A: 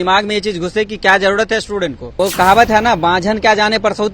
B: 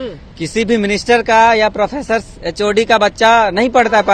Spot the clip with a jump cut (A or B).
A